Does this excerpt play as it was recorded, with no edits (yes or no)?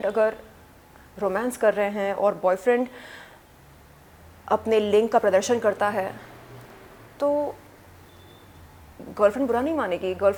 yes